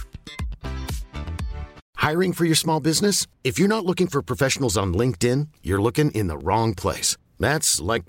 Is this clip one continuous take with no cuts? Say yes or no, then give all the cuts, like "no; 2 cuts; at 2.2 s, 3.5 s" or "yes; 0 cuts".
yes; 0 cuts